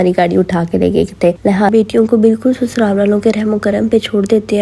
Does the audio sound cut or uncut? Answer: cut